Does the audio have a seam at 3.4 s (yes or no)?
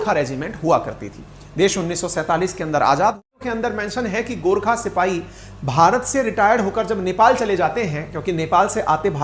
yes